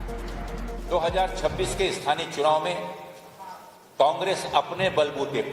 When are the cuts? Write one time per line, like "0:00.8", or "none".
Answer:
none